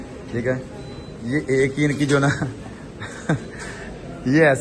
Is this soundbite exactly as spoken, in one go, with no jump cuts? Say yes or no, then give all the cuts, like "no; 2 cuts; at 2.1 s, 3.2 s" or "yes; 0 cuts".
yes; 0 cuts